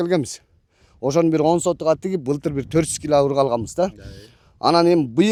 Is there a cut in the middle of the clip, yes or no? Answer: no